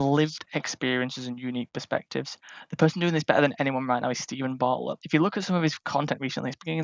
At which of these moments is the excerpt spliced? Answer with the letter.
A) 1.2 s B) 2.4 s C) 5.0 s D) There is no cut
C